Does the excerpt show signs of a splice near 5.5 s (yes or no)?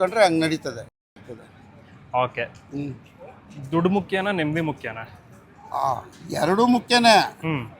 no